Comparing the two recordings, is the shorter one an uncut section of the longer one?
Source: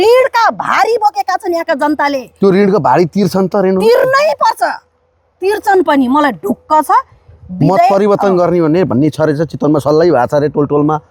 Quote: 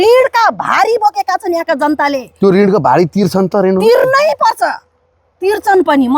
yes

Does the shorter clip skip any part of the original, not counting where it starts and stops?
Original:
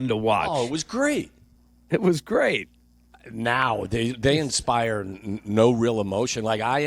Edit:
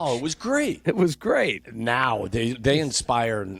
yes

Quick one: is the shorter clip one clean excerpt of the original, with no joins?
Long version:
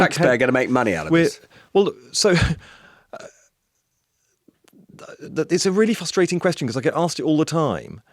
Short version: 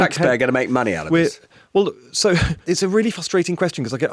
no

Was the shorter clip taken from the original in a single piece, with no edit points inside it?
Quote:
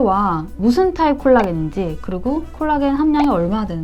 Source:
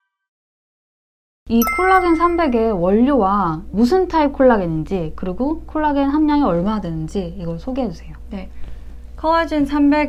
yes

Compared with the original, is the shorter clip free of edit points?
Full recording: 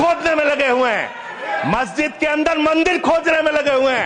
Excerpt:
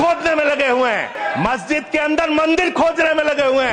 no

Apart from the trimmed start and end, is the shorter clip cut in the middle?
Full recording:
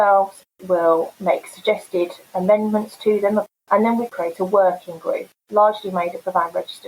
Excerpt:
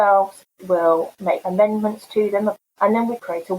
yes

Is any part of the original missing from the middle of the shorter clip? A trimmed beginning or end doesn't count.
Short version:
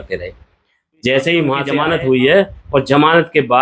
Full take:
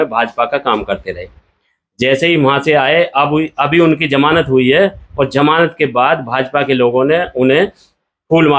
yes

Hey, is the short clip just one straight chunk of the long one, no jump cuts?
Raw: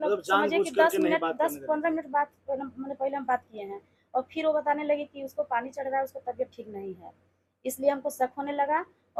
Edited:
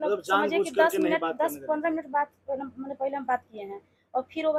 yes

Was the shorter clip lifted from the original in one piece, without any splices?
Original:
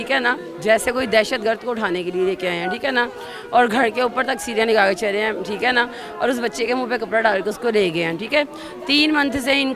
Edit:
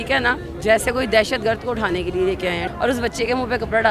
no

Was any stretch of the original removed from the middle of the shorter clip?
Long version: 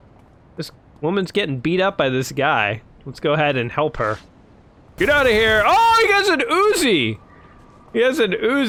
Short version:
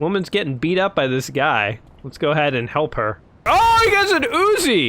yes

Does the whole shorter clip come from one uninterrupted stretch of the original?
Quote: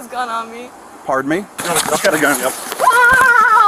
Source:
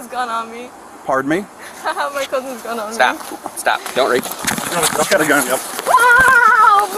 no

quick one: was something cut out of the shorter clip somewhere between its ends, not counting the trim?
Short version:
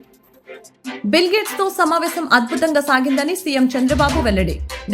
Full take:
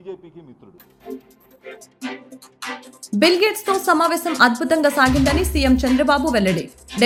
yes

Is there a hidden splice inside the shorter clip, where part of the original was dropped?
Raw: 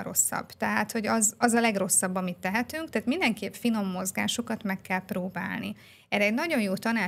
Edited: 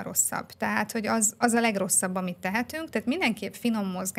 no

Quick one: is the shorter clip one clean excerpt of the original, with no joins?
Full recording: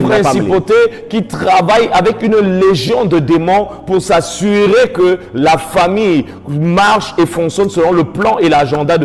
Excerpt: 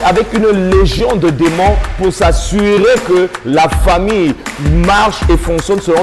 yes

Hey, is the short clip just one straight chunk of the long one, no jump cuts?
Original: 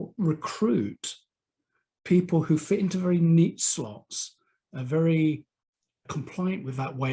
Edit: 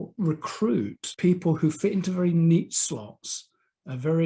no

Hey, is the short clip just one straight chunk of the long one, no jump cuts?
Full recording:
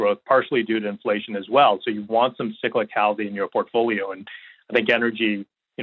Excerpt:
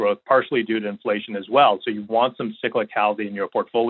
yes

